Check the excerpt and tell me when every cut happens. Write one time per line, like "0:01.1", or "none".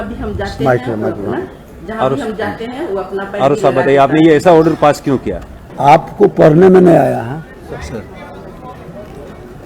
0:05.7